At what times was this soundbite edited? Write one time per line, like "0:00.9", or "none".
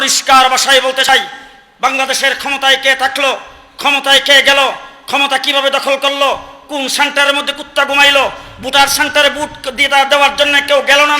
0:01.1